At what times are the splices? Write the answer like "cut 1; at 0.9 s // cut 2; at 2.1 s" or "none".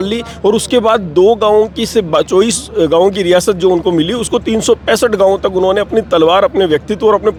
none